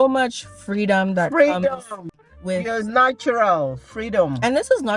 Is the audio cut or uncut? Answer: uncut